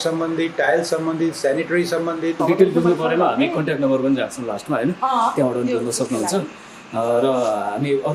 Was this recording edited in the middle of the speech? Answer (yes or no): yes